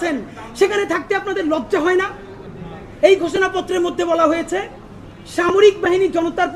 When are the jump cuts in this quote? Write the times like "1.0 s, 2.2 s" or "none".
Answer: 2.3 s

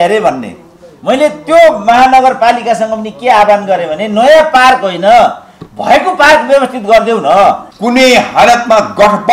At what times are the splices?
7.7 s

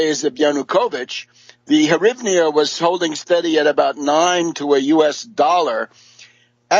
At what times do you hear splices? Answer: 2.0 s

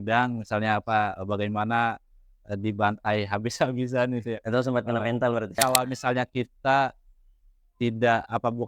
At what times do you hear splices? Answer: 5.6 s

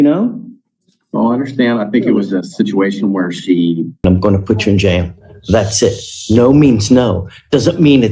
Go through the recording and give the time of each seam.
4.0 s

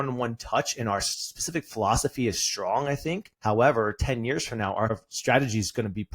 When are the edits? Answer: 3.3 s, 5.0 s

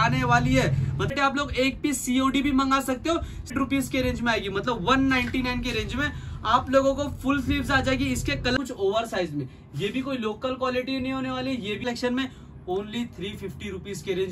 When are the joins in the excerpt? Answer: 1.1 s, 3.5 s, 8.6 s, 11.8 s

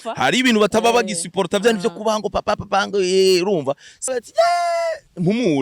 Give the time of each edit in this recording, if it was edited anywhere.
4.1 s

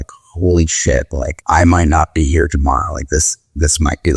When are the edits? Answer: 1.3 s

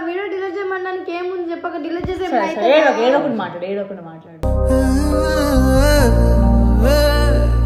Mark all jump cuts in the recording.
none

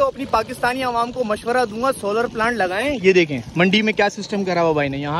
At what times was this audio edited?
none

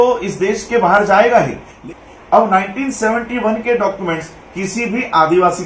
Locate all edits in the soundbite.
1.7 s

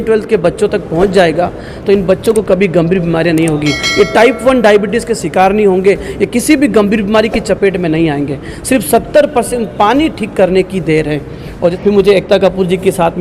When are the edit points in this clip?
11.7 s

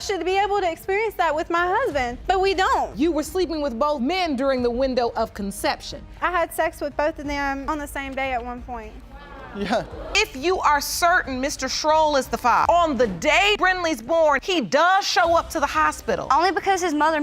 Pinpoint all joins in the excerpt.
10.2 s, 13.6 s

